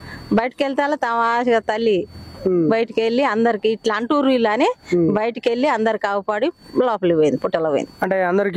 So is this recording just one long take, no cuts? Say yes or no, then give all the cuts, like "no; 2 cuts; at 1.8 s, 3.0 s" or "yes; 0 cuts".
yes; 0 cuts